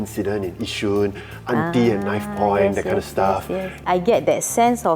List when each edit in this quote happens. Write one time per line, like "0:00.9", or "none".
0:03.8

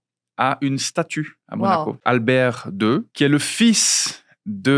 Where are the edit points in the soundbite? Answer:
0:02.0

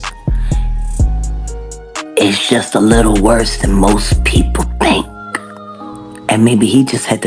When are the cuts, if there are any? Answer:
0:02.1

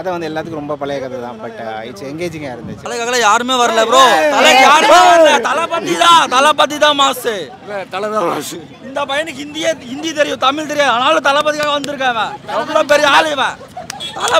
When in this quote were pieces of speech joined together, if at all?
0:02.8

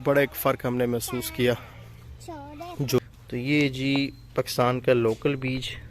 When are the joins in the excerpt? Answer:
0:02.9

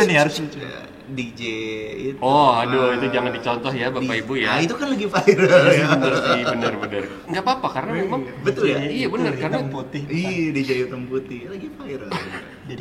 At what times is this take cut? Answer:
none

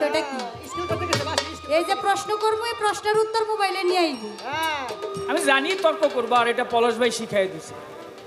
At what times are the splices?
0:05.1

